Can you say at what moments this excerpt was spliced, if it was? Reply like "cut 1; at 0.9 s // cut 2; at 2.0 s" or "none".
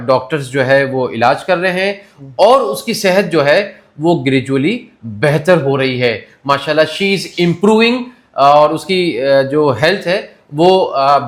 none